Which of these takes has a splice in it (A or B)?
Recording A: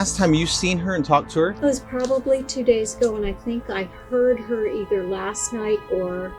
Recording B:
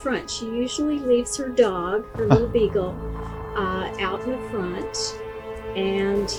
A